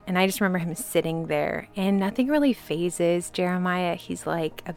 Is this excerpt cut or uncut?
uncut